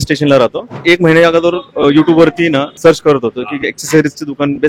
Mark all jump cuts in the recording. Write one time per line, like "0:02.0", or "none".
0:00.8
0:02.7